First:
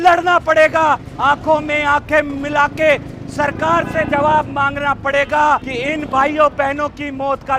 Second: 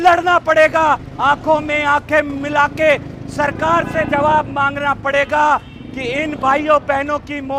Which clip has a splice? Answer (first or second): first